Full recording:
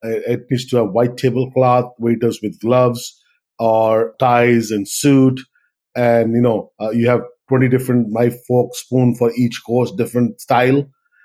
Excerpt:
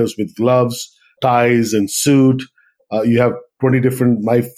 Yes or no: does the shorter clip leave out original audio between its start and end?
yes